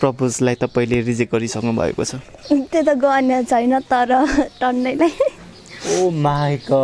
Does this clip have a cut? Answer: no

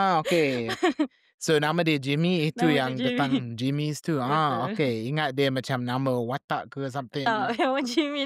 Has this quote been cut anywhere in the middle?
no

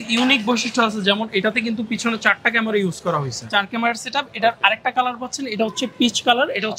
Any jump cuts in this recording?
yes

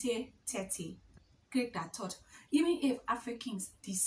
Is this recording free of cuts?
no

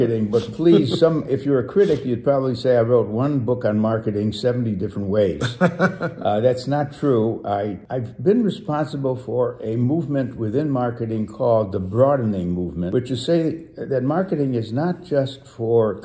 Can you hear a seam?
no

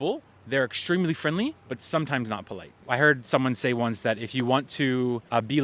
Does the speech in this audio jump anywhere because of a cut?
yes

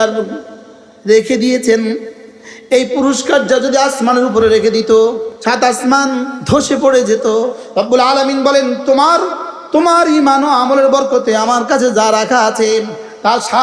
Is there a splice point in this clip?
yes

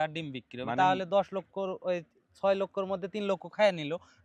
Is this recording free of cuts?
yes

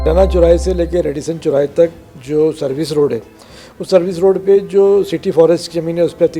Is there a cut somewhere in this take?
no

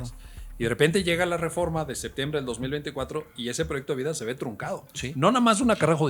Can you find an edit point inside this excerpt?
no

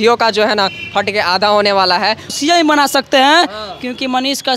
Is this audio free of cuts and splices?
no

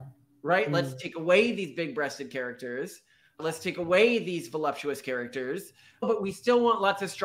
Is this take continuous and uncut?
no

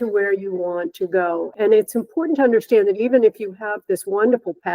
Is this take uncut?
no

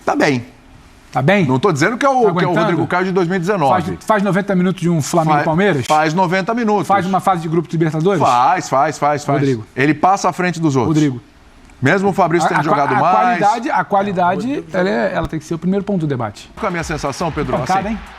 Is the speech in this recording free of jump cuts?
no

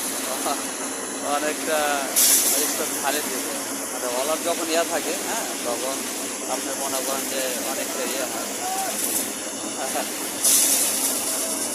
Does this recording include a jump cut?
no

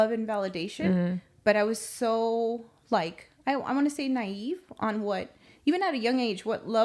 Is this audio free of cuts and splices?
yes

